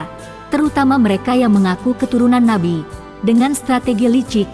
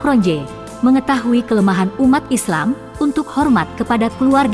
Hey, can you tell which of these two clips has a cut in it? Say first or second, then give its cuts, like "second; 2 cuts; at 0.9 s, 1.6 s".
second; 1 cut; at 2.9 s